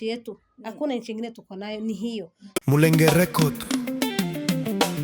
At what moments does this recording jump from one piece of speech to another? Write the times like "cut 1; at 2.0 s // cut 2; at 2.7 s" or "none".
cut 1; at 2.4 s